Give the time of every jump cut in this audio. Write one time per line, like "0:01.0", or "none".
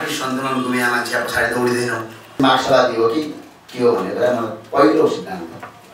0:02.4